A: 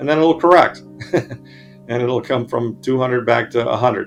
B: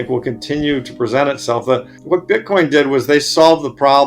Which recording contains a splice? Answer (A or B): B